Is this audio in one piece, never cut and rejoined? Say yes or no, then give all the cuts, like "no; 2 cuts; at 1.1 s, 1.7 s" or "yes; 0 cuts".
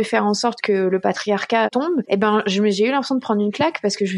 no; 1 cut; at 1.7 s